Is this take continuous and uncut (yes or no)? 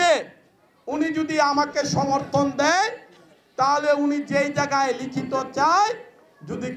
yes